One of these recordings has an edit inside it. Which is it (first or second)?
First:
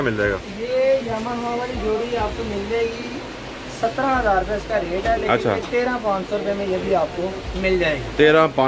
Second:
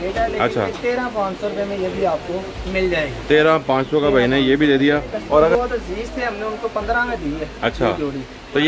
second